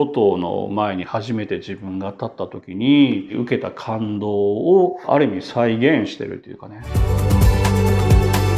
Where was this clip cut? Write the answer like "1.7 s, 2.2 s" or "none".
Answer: 3.3 s, 7.0 s